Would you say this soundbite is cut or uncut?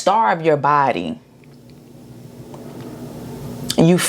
uncut